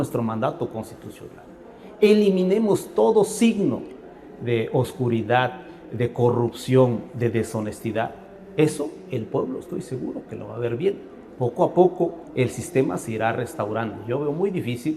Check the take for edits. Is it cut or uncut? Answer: uncut